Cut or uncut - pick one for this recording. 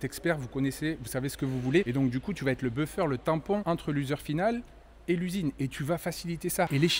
uncut